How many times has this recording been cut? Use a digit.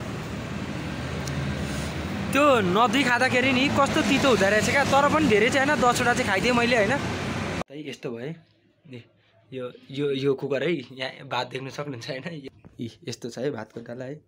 2